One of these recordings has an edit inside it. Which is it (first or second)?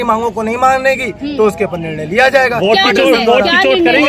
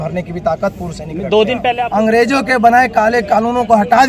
second